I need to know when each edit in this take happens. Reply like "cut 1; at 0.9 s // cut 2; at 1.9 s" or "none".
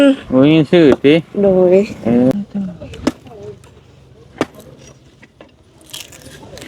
cut 1; at 2.3 s

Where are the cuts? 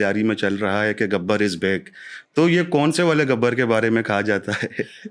none

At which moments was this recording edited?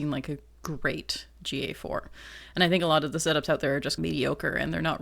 cut 1; at 4.0 s

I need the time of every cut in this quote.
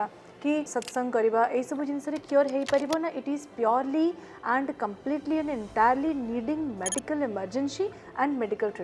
none

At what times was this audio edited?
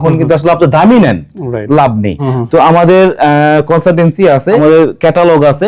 cut 1; at 2.3 s // cut 2; at 4.6 s

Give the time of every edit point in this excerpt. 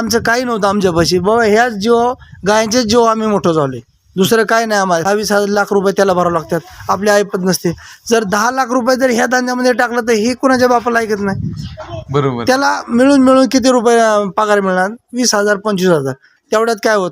cut 1; at 5.0 s

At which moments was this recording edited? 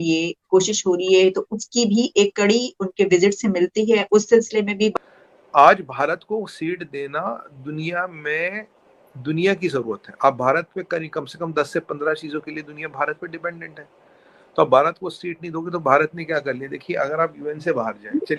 none

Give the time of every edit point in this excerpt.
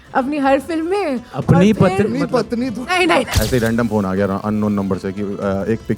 cut 1; at 3.4 s

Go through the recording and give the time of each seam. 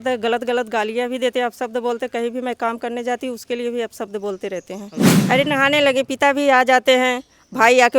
cut 1; at 5.1 s

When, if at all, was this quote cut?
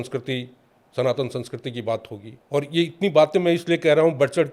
none

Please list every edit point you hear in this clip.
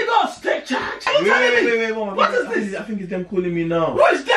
cut 1; at 1.1 s

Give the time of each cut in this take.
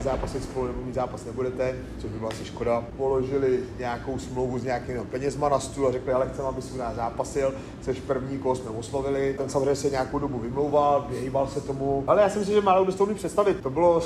cut 1; at 2.9 s // cut 2; at 9.4 s // cut 3; at 12.0 s

